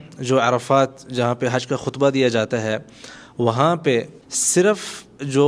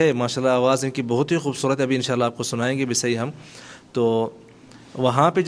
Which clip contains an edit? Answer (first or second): first